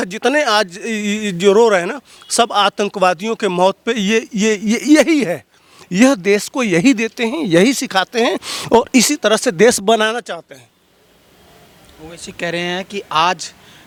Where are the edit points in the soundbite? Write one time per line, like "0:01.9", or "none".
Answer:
none